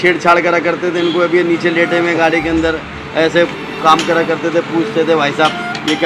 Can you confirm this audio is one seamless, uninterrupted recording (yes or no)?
yes